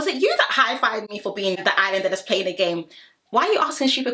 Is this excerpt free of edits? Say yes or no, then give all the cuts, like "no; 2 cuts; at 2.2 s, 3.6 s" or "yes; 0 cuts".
no; 1 cut; at 1.6 s